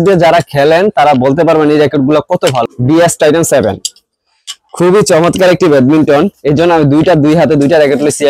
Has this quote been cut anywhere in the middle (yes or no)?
yes